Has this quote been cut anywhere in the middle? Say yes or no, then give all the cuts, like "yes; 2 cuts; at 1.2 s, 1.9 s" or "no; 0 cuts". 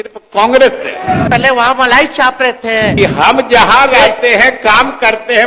yes; 2 cuts; at 1.3 s, 2.9 s